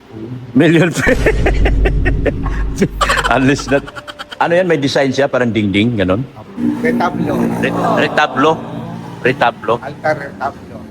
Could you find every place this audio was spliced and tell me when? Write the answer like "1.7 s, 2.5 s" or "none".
6.5 s